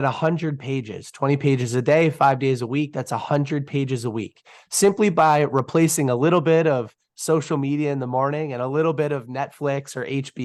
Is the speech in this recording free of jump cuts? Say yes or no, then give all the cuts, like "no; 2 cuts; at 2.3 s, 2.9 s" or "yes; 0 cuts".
yes; 0 cuts